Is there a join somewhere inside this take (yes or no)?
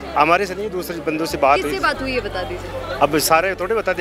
no